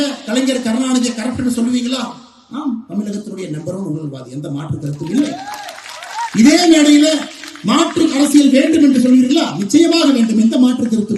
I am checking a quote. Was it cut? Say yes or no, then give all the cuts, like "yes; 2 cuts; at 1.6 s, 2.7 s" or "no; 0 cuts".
no; 0 cuts